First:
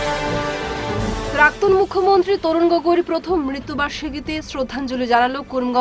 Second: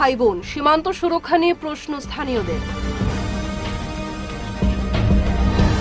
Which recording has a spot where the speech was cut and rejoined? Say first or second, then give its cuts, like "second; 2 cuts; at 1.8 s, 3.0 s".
first; 1 cut; at 0.9 s